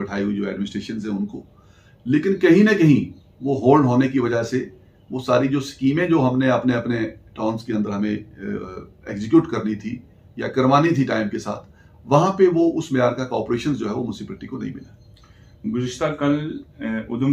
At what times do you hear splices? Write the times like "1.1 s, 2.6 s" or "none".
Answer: none